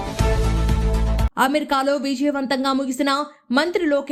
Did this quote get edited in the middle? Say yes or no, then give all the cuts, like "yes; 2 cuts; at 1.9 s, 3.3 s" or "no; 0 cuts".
no; 0 cuts